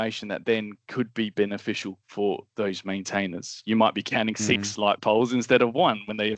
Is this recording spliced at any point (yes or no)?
no